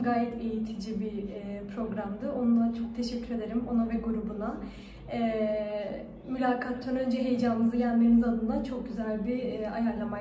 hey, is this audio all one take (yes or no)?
yes